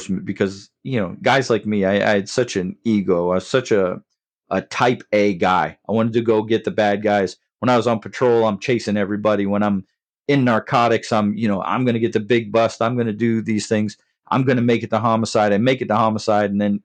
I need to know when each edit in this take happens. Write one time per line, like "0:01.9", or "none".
none